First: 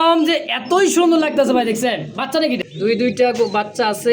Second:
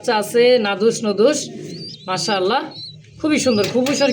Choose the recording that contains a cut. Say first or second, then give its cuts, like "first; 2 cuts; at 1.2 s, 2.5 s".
first; 1 cut; at 2.7 s